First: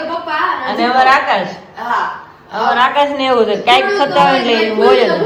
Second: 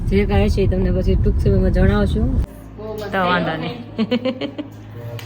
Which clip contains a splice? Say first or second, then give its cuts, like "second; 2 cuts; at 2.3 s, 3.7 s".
second; 1 cut; at 2.4 s